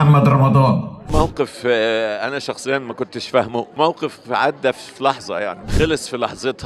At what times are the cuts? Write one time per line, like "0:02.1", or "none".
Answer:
0:01.1
0:03.7
0:05.7